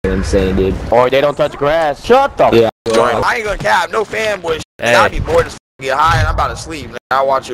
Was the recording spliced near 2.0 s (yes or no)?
yes